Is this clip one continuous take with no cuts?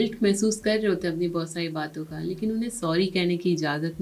yes; 0 cuts

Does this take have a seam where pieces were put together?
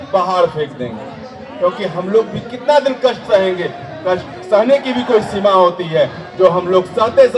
no; 0 cuts

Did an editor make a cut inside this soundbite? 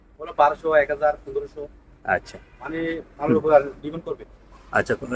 no; 0 cuts

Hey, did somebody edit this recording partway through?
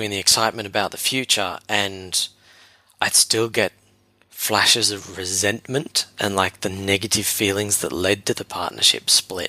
no; 0 cuts

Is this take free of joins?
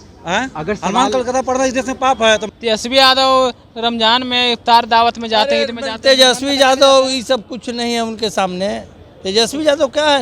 no; 1 cut; at 2.5 s

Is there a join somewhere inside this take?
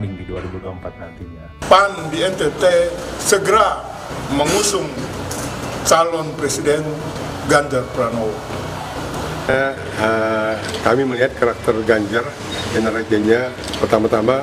no; 0 cuts

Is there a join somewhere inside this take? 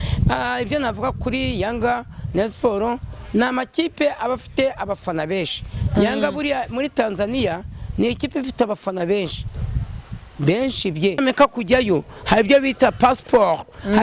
yes; 1 cut; at 11.2 s

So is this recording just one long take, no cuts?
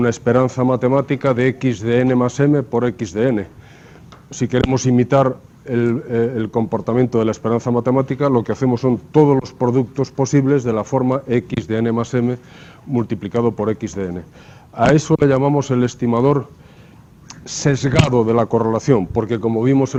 yes; 0 cuts

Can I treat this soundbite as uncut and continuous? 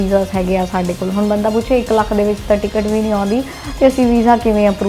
yes; 0 cuts

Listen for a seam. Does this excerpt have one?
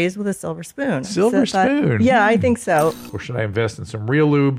yes; 2 cuts; at 1.1 s, 3.0 s

